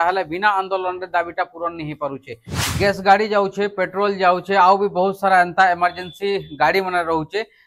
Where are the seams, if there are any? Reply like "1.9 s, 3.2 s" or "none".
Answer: 2.5 s